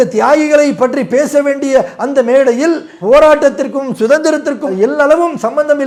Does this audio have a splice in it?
no; 0 cuts

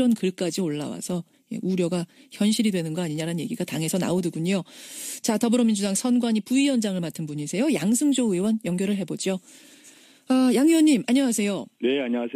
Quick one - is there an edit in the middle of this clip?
yes; 1 cut; at 2.5 s

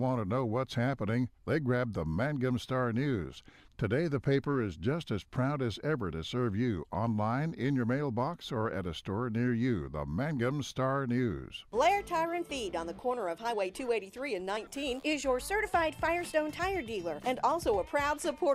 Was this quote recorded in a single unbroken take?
yes; 0 cuts

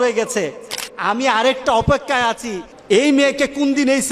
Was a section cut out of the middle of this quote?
no; 0 cuts

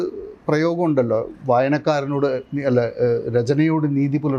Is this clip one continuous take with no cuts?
yes; 0 cuts

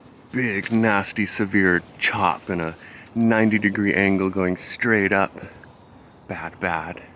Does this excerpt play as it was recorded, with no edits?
yes; 0 cuts

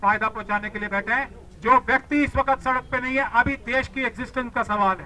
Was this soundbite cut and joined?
no; 0 cuts

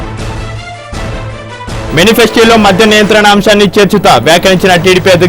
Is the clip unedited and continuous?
no; 1 cut; at 1.4 s

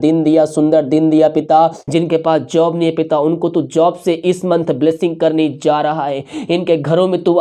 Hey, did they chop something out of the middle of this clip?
yes; 1 cut; at 1.8 s

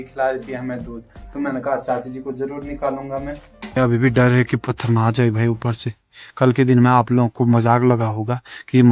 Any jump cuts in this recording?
yes; 1 cut; at 3.8 s

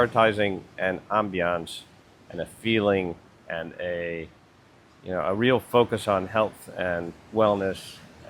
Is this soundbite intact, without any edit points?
yes; 0 cuts

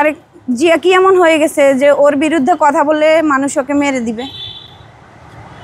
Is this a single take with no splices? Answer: yes; 0 cuts

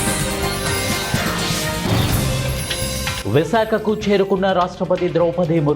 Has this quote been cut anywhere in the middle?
yes; 1 cut; at 3.2 s

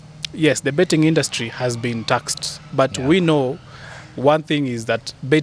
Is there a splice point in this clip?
no; 0 cuts

